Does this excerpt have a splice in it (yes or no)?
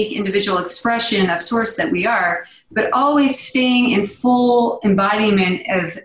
no